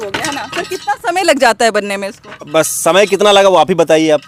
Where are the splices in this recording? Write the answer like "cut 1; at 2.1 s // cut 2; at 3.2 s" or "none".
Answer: none

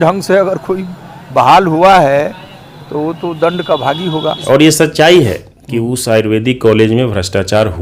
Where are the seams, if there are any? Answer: cut 1; at 4.3 s

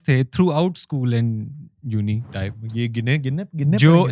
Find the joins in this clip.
none

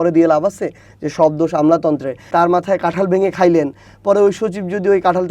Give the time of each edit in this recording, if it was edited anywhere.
cut 1; at 2.3 s

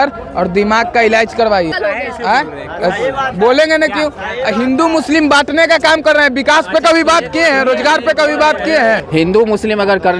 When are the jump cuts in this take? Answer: cut 1; at 9.0 s

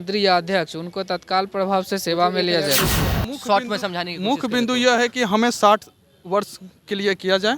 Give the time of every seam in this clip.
cut 1; at 3.2 s

